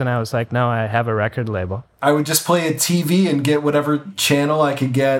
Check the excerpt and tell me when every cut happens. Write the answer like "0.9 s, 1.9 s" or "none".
1.9 s